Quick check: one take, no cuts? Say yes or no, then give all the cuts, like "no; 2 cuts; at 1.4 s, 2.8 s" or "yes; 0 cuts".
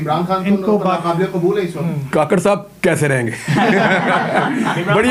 yes; 0 cuts